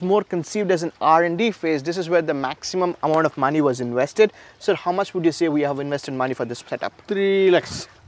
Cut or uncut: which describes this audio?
uncut